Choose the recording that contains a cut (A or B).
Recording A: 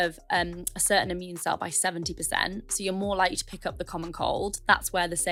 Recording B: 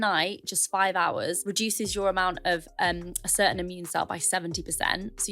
B